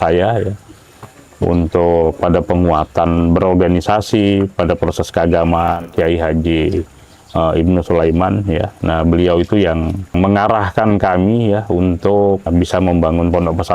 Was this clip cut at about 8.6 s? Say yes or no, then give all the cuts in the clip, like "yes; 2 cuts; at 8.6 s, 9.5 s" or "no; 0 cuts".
no; 3 cuts; at 5.8 s, 10.1 s, 12.5 s